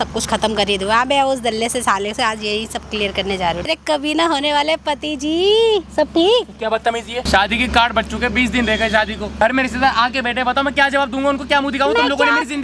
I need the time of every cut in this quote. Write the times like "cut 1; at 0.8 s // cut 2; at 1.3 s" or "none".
cut 1; at 3.7 s // cut 2; at 7.3 s // cut 3; at 9.3 s